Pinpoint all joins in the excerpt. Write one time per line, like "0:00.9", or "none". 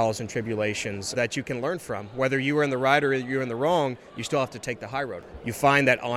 0:01.1
0:05.2